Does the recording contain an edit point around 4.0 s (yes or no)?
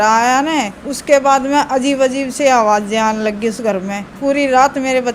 yes